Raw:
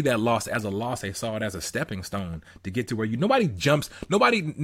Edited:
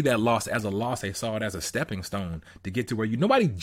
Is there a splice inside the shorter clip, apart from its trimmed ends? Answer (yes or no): no